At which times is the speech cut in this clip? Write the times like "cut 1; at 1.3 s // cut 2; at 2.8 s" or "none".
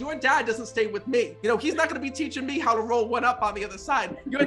cut 1; at 1.3 s